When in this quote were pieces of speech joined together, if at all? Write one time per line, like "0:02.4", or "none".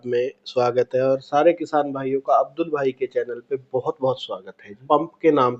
0:04.7